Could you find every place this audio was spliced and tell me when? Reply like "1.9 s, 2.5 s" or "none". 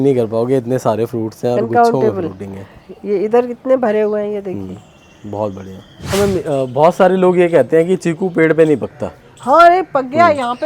6.1 s